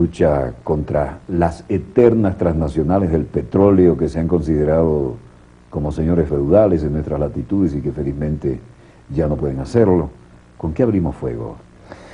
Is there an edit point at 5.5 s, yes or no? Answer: no